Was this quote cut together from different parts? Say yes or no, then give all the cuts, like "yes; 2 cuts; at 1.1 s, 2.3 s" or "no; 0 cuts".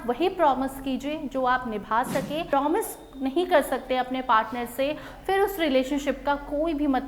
yes; 1 cut; at 2.5 s